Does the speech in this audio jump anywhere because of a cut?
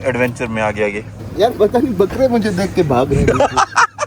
yes; 1 cut; at 1.1 s

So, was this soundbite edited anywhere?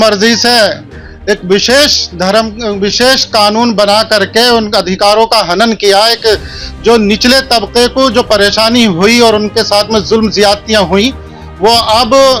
no; 0 cuts

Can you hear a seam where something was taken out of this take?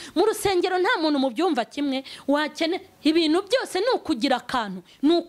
no; 0 cuts

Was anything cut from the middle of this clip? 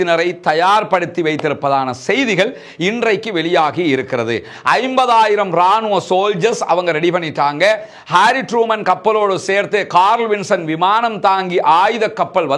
no; 0 cuts

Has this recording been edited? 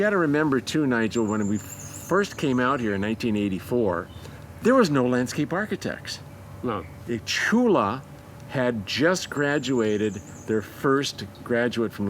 no; 0 cuts

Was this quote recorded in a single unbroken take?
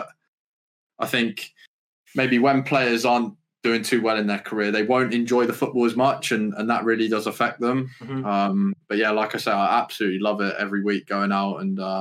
yes; 0 cuts

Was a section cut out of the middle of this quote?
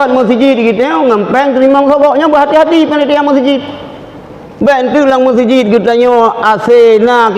no; 0 cuts

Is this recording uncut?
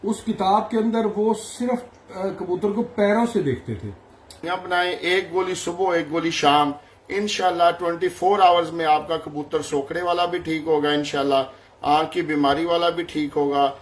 no; 1 cut; at 4.5 s

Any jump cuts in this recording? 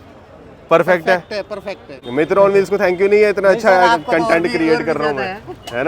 yes; 1 cut; at 2.0 s

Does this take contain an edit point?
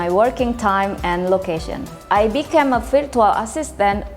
yes; 1 cut; at 1.9 s

